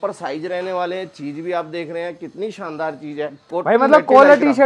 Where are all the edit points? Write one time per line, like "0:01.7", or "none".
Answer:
0:03.4